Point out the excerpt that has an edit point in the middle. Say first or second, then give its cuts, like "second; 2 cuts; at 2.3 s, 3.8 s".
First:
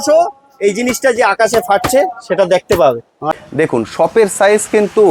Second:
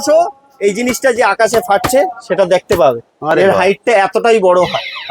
first; 1 cut; at 3.3 s